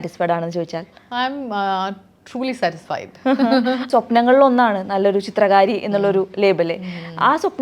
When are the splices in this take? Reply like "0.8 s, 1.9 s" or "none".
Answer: 3.9 s